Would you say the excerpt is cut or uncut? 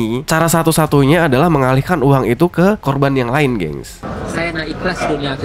cut